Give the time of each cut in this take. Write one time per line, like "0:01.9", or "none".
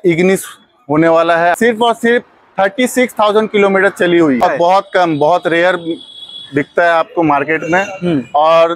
0:01.6
0:04.4

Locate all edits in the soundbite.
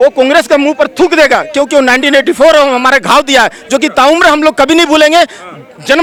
none

